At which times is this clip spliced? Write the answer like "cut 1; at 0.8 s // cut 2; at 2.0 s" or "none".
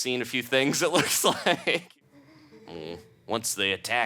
cut 1; at 1.9 s